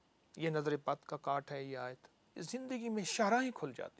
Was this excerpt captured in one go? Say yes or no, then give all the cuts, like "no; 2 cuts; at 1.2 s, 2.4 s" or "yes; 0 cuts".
no; 1 cut; at 2.4 s